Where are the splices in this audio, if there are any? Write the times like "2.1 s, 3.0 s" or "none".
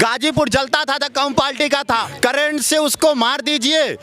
2.1 s